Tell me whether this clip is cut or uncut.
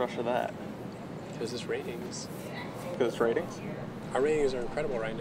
uncut